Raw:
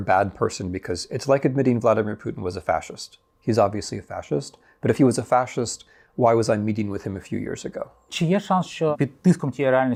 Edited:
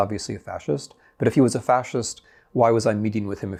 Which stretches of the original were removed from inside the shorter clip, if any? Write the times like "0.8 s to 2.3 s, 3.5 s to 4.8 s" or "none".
none